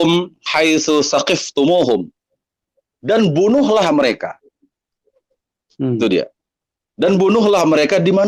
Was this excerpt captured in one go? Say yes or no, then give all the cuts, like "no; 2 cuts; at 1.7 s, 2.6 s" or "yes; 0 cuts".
yes; 0 cuts